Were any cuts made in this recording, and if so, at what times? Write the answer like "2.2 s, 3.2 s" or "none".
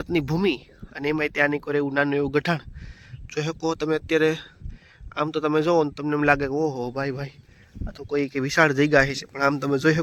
none